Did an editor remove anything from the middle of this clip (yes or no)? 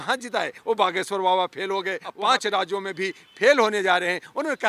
yes